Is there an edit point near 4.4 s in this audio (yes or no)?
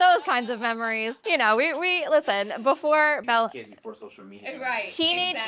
no